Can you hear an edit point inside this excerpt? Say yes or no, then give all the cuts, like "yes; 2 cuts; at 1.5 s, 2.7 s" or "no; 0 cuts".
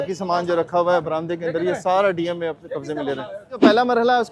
yes; 1 cut; at 3.4 s